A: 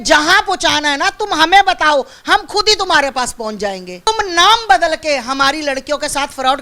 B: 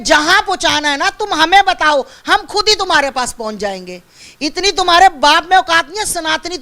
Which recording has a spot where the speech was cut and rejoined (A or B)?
A